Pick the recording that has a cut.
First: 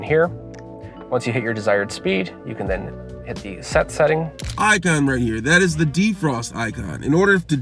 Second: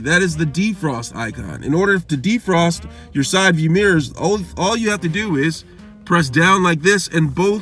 first; 1 cut; at 4.4 s

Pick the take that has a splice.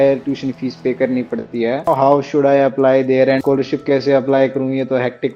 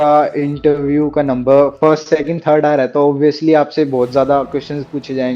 first; 2 cuts; at 1.9 s, 3.4 s

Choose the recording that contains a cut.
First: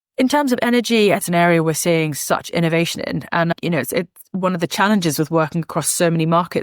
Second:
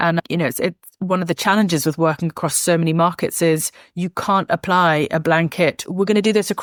first; 1 cut; at 1.2 s

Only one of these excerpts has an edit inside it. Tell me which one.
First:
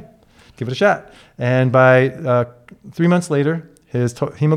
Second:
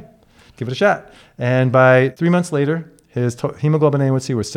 second; 1 cut; at 2.1 s

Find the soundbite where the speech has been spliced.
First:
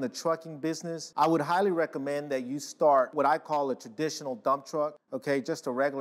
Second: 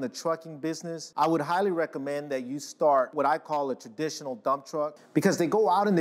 second; 1 cut; at 5.0 s

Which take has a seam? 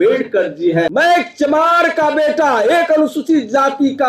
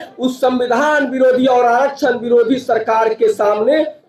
first; 1 cut; at 0.9 s

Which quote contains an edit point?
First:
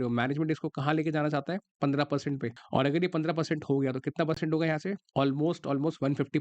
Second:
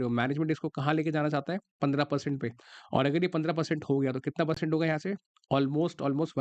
first; 2 cuts; at 2.5 s, 5.0 s

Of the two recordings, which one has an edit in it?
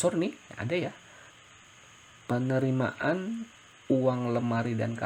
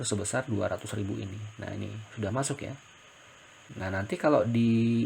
second; 1 cut; at 3.7 s

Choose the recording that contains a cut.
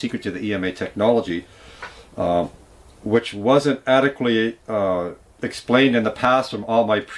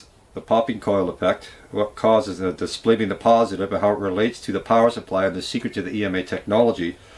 second; 1 cut; at 3.8 s

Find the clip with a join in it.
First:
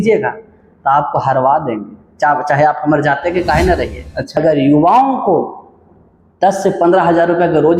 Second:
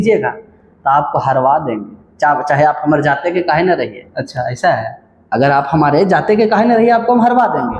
first; 1 cut; at 4.4 s

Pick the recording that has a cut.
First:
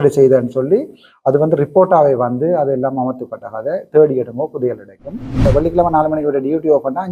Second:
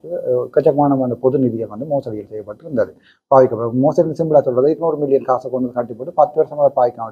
first; 1 cut; at 5.4 s

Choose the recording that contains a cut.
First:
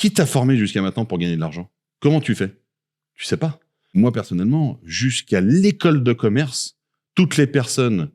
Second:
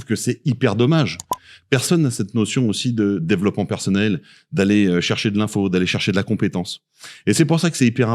first; 1 cut; at 3.9 s

